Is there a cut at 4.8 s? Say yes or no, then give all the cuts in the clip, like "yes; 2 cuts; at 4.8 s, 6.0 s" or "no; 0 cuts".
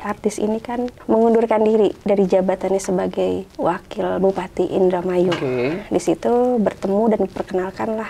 no; 2 cuts; at 1.0 s, 3.5 s